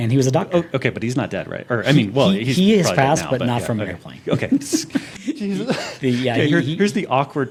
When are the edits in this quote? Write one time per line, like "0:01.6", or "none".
none